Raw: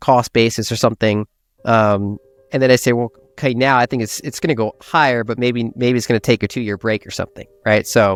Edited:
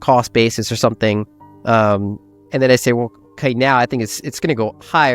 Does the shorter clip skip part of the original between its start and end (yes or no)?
no